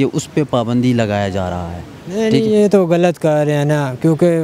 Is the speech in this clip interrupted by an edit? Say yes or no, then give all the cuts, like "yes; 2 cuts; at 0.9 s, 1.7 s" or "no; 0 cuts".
no; 0 cuts